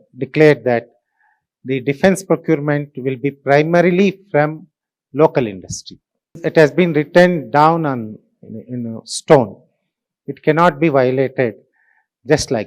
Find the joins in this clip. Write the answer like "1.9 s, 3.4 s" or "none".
6.4 s